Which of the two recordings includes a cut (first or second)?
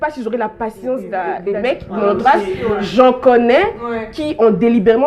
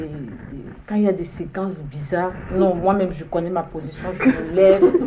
first